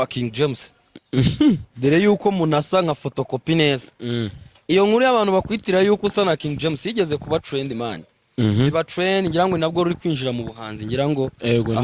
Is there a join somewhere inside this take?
no; 0 cuts

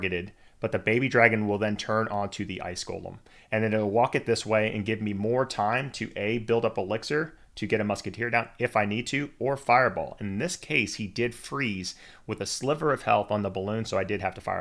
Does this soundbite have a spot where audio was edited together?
no; 0 cuts

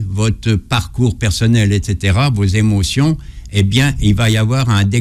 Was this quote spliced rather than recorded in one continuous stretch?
no; 0 cuts

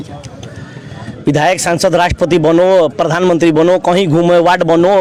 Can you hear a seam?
no; 0 cuts

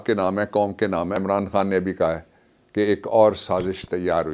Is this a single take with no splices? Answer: no; 1 cut; at 1.2 s

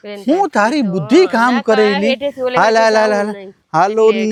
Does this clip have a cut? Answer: no; 0 cuts

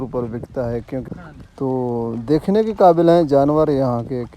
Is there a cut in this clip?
yes; 1 cut; at 1.1 s

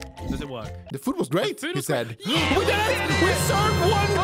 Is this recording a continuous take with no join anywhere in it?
yes; 0 cuts

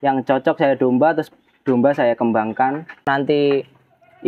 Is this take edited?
yes; 1 cut; at 3.0 s

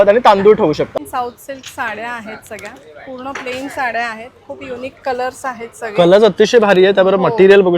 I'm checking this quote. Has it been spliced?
yes; 1 cut; at 1.0 s

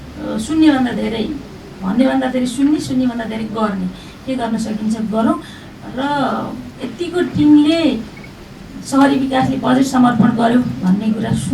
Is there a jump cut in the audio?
no; 0 cuts

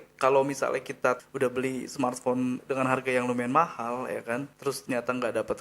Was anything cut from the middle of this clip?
yes; 3 cuts; at 1.2 s, 2.6 s, 4.5 s

